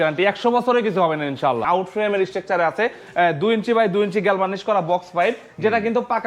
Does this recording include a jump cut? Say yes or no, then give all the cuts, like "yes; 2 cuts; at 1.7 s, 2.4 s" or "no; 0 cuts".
yes; 1 cut; at 1.6 s